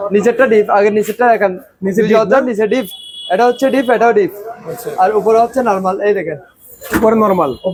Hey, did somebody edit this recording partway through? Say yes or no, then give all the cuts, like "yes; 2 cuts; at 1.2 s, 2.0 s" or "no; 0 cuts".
no; 0 cuts